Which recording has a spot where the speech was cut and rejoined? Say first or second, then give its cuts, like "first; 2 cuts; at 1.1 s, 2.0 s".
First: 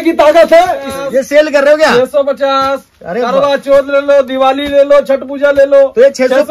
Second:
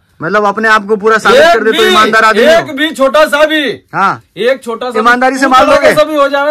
first; 1 cut; at 0.9 s